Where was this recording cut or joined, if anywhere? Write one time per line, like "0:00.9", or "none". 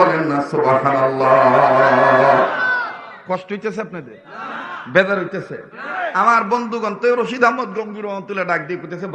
0:06.0